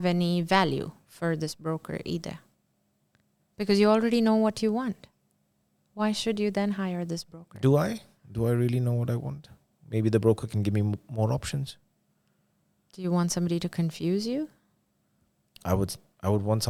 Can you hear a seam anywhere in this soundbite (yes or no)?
no